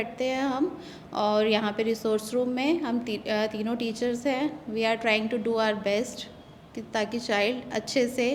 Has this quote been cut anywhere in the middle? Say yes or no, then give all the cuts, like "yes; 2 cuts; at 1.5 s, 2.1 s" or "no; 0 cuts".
no; 0 cuts